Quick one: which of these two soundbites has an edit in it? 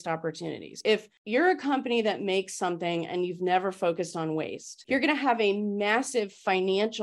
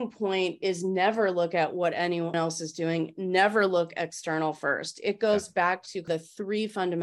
second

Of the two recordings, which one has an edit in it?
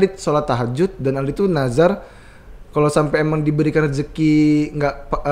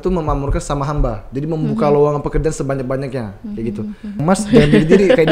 second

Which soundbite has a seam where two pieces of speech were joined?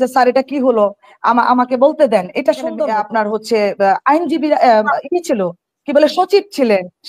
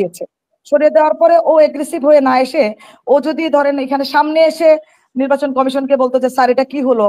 first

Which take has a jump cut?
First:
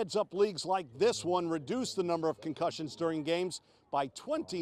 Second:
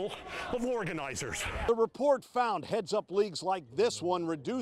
second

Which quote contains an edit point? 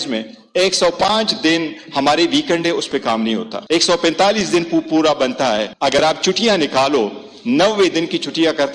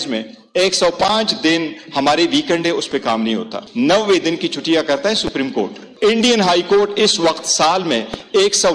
second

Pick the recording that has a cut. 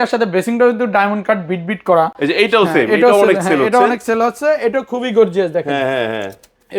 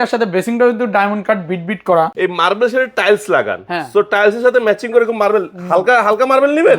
second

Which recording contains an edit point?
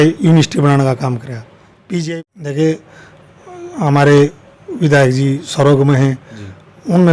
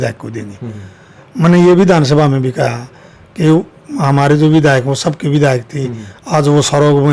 first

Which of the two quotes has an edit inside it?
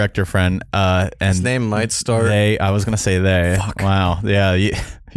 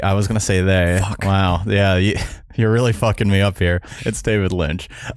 second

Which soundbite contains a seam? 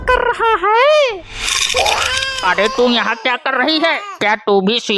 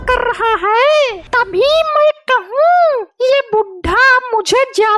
second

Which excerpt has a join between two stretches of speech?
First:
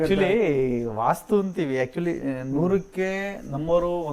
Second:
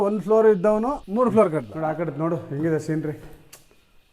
second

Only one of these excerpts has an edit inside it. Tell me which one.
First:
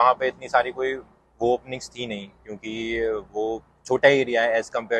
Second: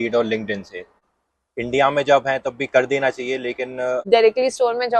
second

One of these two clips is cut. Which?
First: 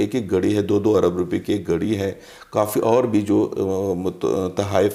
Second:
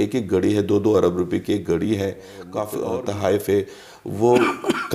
second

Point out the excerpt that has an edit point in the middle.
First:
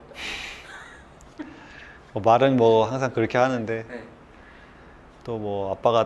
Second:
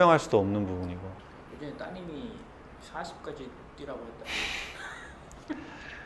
second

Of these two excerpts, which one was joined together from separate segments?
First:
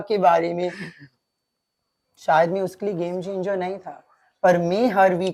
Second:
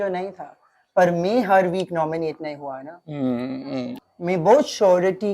second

